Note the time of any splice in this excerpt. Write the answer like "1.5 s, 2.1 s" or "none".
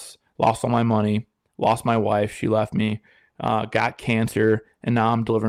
none